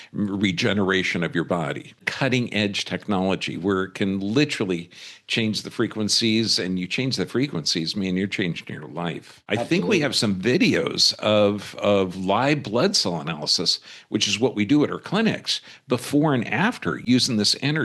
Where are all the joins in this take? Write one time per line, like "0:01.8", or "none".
0:02.1
0:09.3